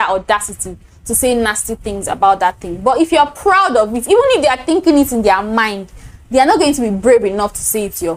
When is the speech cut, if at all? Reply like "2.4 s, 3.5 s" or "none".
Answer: none